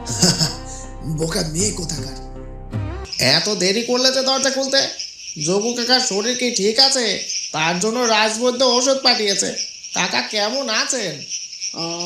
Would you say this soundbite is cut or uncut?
cut